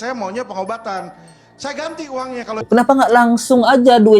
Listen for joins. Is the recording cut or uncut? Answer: cut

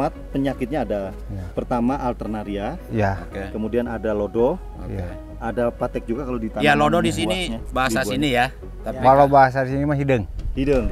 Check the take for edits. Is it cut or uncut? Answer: uncut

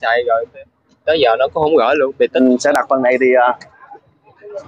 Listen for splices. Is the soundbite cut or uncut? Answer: cut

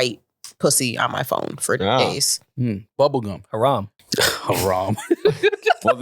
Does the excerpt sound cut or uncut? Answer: cut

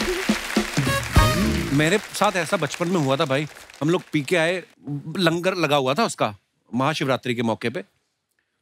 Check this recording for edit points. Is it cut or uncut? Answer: uncut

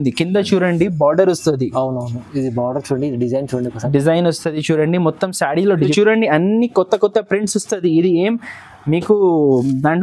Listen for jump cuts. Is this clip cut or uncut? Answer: cut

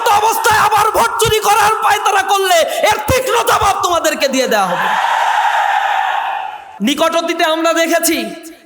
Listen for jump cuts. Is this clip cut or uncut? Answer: cut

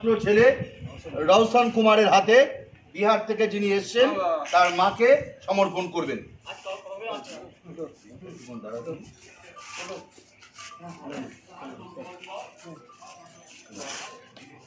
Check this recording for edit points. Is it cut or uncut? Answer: uncut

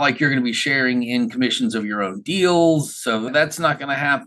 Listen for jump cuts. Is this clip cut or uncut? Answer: cut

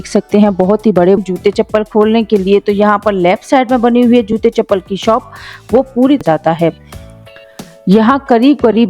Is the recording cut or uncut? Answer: cut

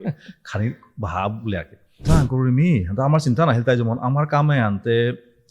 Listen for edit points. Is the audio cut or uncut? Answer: cut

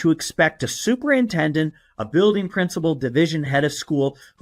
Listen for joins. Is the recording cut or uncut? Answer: cut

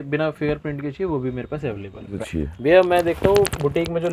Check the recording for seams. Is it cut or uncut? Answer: cut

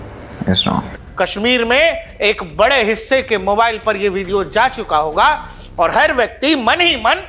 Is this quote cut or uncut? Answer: cut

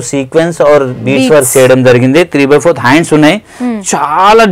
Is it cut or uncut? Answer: uncut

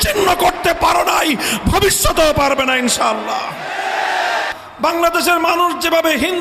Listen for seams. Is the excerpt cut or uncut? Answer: cut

